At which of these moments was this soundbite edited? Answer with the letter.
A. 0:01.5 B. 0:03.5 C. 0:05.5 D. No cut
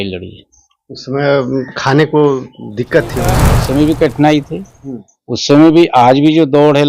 B